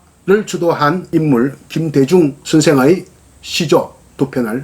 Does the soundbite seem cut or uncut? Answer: cut